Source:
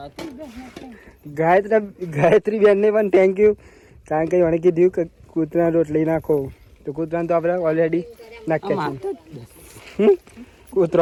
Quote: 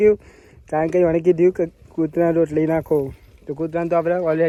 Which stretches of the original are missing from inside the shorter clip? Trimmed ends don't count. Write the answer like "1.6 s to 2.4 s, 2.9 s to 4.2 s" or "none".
none